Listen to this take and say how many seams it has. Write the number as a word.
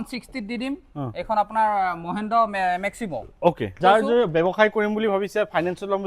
one